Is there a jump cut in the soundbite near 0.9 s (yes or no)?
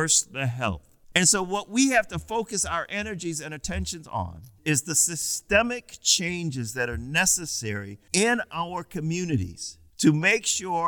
yes